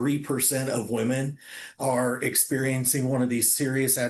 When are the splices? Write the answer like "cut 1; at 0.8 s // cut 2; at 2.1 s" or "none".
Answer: none